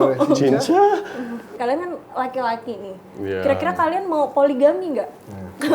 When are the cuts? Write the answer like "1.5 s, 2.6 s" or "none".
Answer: 1.5 s